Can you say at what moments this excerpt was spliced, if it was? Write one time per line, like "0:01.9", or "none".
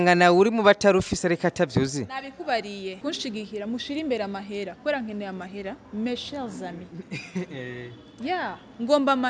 0:03.0